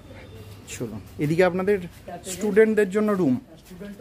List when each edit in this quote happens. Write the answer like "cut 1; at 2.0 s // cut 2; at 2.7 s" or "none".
none